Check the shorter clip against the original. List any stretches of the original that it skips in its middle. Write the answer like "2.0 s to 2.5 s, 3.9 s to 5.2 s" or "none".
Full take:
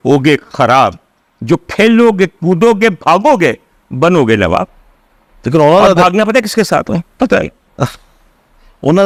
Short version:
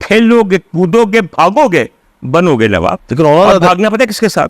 4.7 s to 5.4 s